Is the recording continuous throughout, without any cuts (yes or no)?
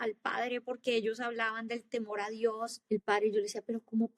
no